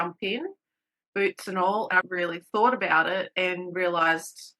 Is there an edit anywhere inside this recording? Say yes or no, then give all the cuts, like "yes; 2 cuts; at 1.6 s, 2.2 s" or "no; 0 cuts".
yes; 1 cut; at 1.9 s